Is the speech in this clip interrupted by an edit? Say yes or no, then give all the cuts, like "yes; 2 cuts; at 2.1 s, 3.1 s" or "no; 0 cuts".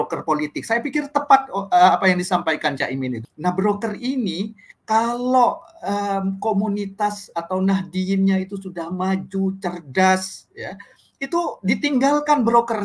yes; 1 cut; at 3.2 s